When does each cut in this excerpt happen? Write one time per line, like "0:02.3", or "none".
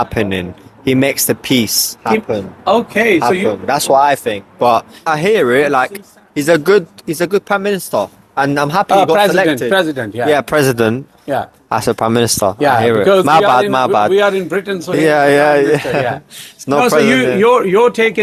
none